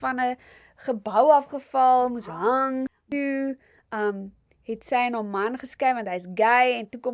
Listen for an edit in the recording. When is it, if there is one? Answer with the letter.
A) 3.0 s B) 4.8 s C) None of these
A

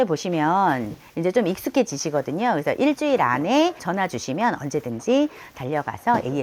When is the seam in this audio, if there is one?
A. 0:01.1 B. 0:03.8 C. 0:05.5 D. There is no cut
B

